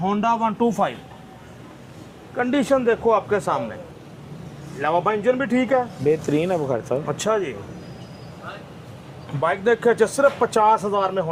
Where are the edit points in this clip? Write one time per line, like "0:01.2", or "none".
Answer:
none